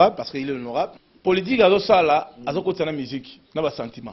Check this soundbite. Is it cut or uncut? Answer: cut